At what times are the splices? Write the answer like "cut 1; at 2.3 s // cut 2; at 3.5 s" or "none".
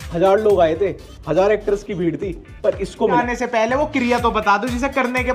cut 1; at 3.2 s